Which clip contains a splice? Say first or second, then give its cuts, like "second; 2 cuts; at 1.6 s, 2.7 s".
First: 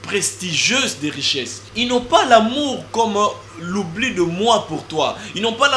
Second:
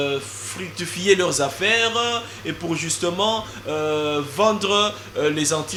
first; 1 cut; at 1.6 s